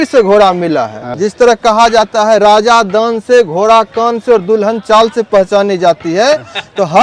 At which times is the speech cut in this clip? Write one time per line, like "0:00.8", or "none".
0:01.0